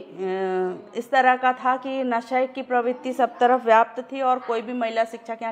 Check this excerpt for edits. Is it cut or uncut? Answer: uncut